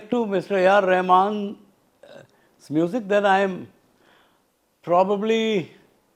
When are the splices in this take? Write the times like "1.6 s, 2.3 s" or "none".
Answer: none